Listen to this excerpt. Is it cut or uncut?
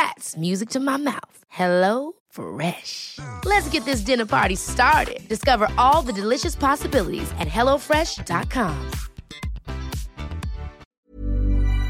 cut